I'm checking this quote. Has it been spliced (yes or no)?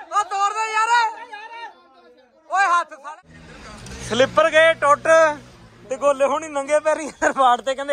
yes